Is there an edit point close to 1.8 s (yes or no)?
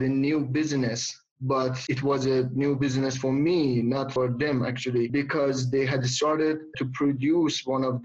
yes